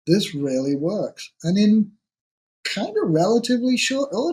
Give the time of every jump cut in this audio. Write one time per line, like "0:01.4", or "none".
none